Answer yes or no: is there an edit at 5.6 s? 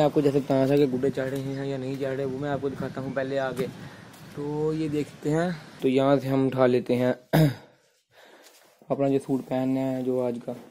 yes